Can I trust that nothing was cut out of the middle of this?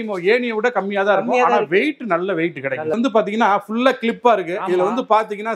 no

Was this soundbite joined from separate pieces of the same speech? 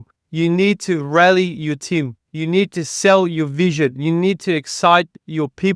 no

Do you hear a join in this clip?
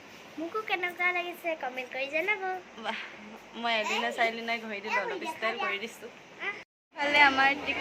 yes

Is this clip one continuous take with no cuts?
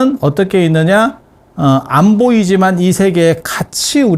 yes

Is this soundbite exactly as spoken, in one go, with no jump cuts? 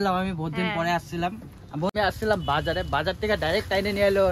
no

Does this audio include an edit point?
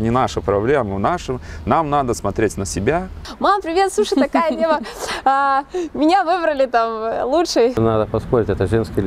yes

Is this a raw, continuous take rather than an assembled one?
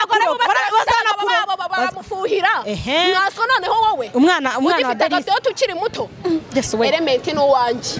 yes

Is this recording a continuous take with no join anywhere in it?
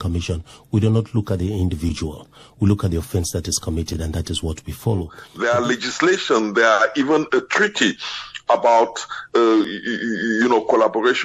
no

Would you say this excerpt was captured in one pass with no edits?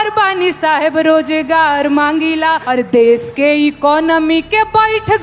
no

